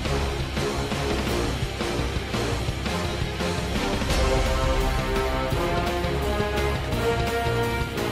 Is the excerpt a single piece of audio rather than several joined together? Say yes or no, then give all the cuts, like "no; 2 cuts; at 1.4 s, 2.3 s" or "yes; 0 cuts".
yes; 0 cuts